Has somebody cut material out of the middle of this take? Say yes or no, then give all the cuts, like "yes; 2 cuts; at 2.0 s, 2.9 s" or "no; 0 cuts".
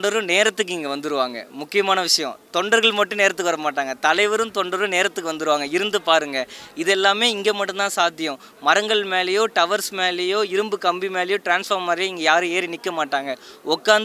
no; 0 cuts